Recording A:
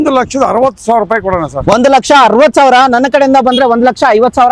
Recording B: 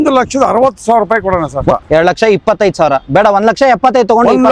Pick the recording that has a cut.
B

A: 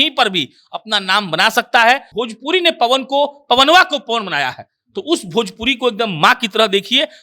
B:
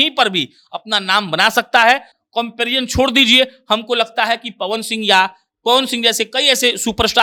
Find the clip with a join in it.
A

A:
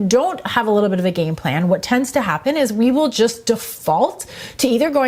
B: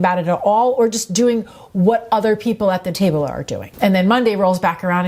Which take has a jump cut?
B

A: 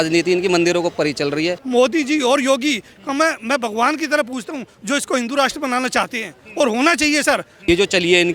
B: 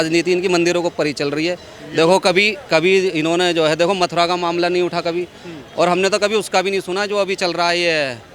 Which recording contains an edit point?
A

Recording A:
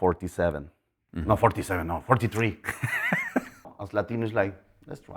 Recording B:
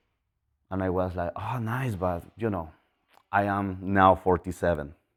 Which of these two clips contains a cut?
A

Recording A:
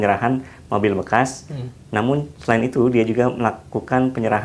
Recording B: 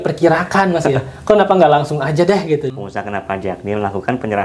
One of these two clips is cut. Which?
B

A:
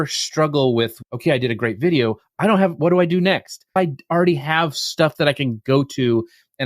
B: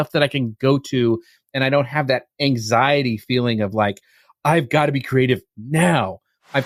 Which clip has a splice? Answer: A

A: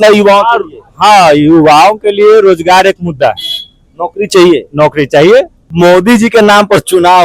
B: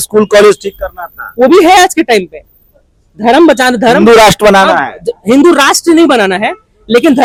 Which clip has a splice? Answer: A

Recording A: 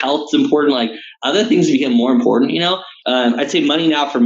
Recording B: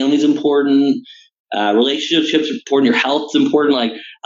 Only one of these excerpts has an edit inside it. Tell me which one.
A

